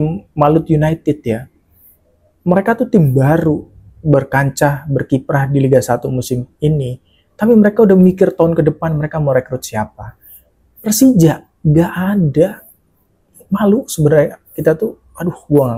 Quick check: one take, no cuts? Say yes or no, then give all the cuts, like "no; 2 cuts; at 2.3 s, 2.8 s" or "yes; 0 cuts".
yes; 0 cuts